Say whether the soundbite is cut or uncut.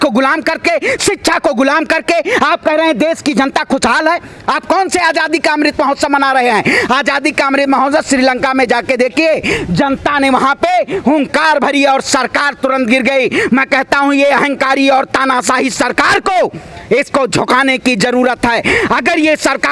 uncut